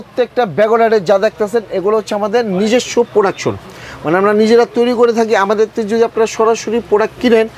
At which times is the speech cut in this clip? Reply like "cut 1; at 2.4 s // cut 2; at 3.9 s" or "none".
none